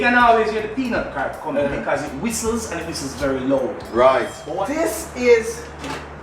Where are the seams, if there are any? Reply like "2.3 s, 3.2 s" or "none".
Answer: 4.7 s